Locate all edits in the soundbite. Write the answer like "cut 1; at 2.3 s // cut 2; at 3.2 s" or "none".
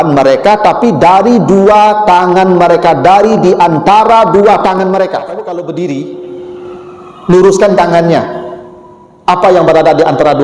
cut 1; at 5.4 s